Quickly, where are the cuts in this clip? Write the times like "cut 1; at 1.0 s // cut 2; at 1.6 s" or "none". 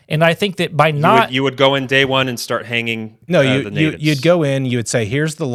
none